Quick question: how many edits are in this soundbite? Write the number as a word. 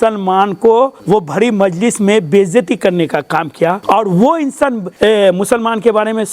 three